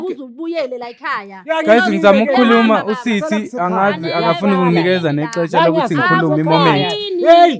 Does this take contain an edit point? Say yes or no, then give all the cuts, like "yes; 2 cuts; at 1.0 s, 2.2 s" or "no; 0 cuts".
no; 0 cuts